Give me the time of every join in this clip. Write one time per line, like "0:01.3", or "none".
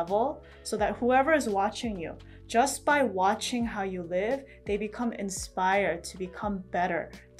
none